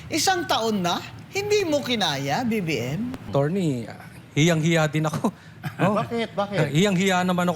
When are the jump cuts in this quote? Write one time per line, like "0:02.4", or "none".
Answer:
0:03.2